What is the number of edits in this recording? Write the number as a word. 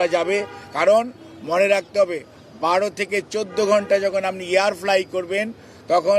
zero